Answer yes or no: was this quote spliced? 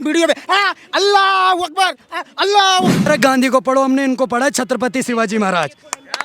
yes